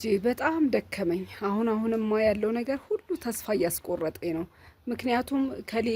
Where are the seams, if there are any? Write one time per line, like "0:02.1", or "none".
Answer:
none

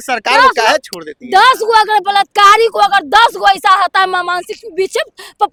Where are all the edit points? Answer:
none

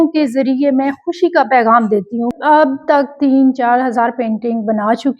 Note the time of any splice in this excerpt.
0:02.3

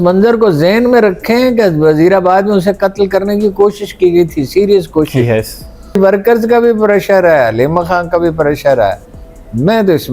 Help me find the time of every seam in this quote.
0:06.0

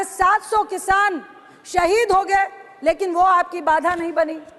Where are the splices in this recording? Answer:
none

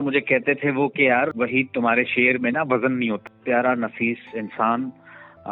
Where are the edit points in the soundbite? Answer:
0:01.3
0:03.2

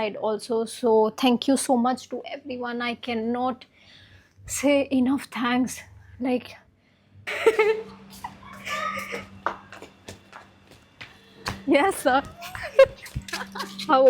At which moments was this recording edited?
0:07.4

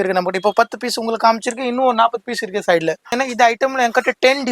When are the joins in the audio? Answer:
0:03.0

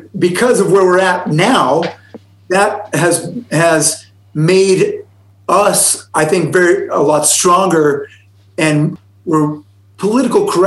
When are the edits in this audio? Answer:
0:08.9

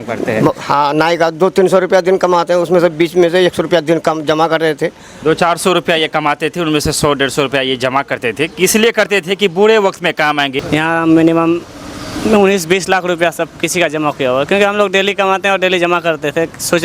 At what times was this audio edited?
0:10.6

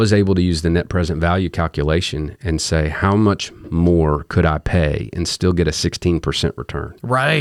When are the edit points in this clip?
none

